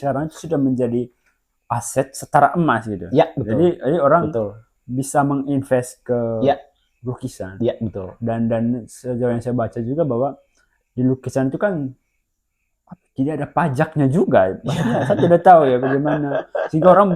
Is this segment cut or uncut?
uncut